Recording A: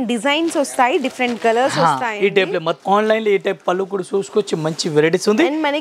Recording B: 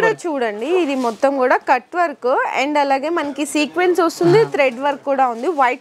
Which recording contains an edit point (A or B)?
A